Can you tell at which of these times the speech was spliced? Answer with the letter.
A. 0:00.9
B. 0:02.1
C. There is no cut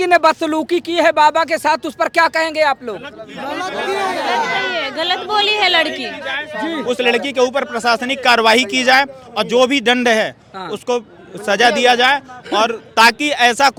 C